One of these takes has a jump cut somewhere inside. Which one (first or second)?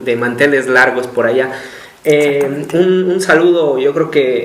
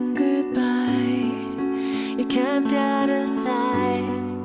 first